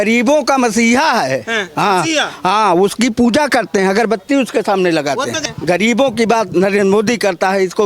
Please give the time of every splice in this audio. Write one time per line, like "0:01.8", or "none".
0:05.4